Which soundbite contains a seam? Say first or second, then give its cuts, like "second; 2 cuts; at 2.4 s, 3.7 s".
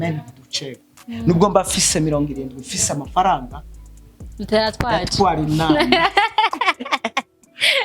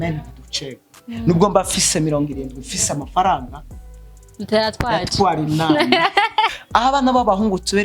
second; 1 cut; at 6.6 s